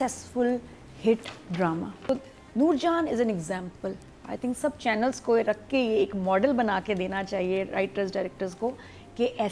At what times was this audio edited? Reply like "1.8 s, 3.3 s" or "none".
2.1 s